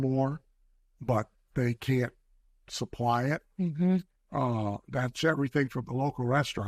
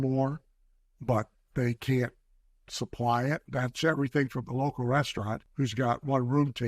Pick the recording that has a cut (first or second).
second